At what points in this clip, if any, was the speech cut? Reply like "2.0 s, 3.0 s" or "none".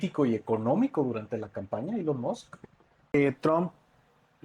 3.1 s